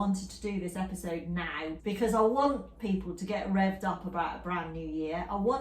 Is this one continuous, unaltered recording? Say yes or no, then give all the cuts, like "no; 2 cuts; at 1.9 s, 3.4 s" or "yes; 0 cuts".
no; 1 cut; at 1.8 s